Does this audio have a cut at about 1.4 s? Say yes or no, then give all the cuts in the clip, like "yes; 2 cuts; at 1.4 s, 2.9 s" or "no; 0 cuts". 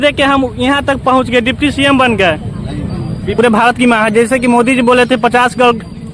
no; 1 cut; at 3.3 s